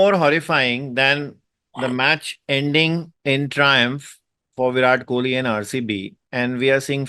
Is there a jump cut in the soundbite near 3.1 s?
yes; 2 cuts; at 3.1 s, 6.2 s

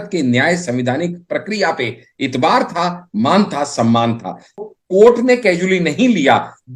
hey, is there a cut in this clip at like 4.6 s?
yes; 1 cut; at 4.6 s

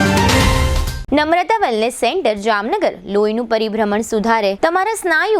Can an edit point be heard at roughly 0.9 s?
yes; 1 cut; at 0.9 s

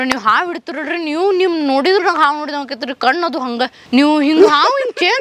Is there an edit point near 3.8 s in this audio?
yes; 1 cut; at 3.8 s

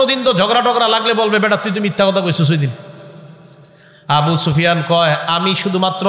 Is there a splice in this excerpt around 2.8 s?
no; 0 cuts

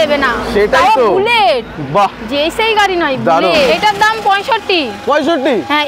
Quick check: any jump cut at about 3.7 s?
yes; 1 cut; at 3.7 s

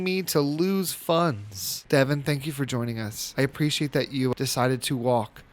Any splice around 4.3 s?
yes; 1 cut; at 4.3 s

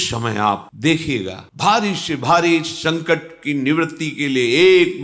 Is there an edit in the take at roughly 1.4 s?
yes; 1 cut; at 1.4 s

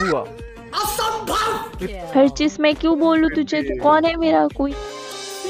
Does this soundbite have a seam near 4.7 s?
yes; 2 cuts; at 1.8 s, 4.7 s

